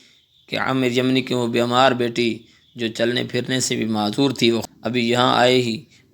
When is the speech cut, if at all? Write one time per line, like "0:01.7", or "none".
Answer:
0:04.6